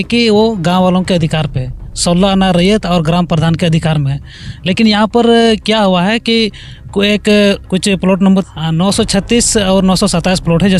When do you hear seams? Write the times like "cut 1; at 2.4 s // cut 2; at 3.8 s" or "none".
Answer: cut 1; at 8.2 s